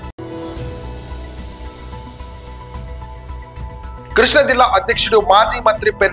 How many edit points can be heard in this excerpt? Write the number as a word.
one